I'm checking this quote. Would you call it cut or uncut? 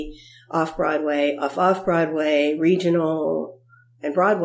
uncut